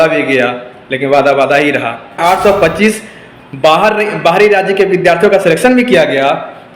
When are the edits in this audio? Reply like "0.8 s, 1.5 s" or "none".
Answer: 2.2 s